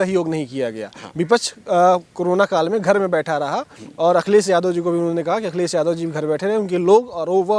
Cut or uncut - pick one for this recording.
uncut